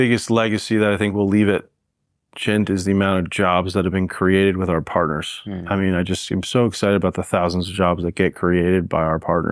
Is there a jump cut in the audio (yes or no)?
no